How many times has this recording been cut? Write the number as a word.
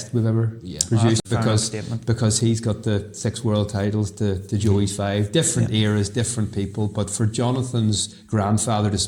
zero